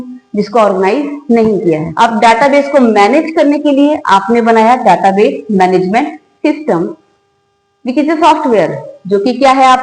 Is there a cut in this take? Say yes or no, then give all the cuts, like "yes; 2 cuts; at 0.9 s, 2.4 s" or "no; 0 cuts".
yes; 1 cut; at 1.9 s